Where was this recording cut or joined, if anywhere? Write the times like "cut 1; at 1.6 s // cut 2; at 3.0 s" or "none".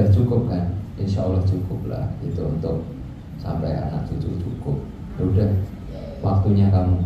none